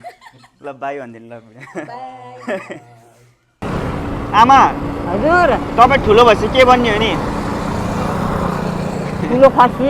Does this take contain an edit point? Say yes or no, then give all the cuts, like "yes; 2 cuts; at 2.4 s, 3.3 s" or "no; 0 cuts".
yes; 1 cut; at 3.6 s